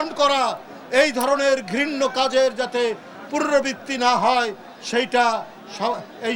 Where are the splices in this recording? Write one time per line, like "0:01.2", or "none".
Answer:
none